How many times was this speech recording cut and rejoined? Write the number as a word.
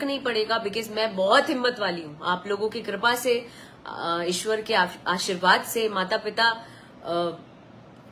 zero